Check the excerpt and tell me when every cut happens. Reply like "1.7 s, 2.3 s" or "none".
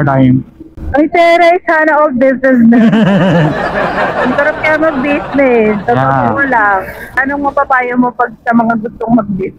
7.2 s